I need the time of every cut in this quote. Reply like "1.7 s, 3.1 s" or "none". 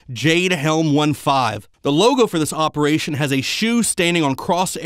2.9 s